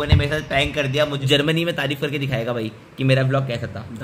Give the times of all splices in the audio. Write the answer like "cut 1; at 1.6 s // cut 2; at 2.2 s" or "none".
cut 1; at 1.2 s